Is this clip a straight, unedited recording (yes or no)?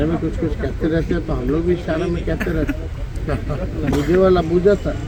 yes